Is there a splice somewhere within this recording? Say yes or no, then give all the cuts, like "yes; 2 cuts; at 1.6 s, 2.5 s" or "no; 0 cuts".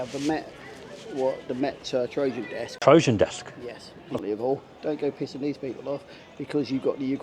yes; 2 cuts; at 2.7 s, 4.2 s